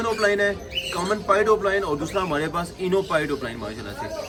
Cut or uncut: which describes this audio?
uncut